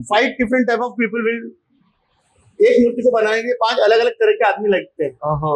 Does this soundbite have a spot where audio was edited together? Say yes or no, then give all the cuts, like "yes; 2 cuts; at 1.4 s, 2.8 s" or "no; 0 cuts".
no; 0 cuts